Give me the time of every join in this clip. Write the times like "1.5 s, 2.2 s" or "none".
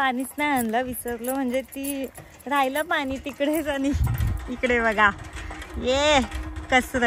none